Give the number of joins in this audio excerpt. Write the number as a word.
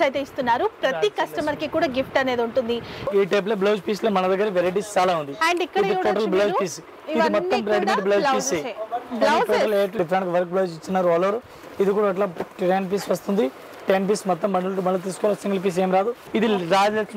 three